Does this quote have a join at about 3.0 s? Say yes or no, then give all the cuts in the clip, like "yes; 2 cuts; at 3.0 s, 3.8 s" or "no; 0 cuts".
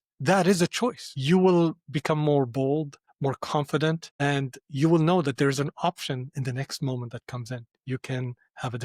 yes; 4 cuts; at 1.1 s, 3.0 s, 4.1 s, 7.7 s